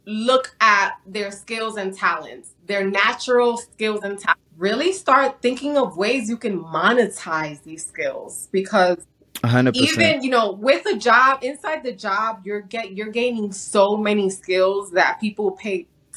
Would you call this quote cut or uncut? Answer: cut